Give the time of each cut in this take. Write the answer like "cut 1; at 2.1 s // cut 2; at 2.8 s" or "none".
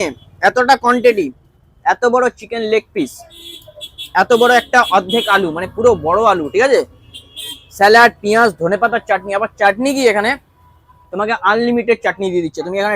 none